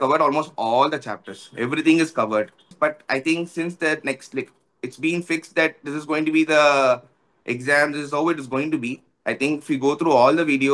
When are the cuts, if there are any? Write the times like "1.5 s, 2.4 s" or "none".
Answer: 2.7 s